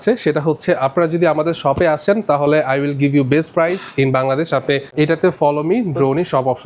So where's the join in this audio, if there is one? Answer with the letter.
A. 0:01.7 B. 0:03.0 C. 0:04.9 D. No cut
C